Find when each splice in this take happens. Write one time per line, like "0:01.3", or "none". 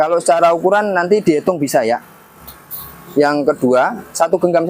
none